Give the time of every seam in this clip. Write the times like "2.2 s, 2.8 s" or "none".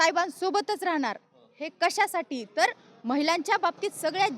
none